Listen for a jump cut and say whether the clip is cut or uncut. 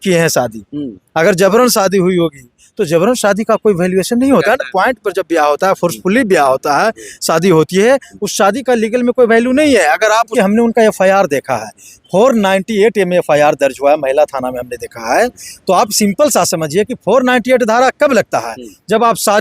cut